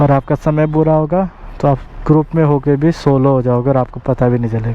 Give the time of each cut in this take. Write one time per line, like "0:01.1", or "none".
none